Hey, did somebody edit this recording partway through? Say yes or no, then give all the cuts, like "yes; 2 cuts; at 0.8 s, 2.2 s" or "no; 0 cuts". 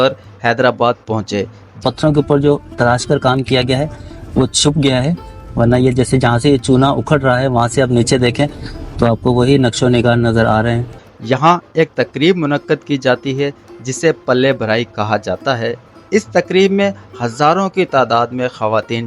yes; 2 cuts; at 1.8 s, 10.9 s